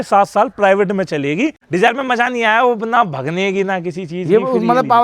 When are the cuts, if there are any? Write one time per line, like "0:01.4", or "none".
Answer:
0:01.6